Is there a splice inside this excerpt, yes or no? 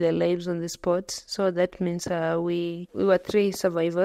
no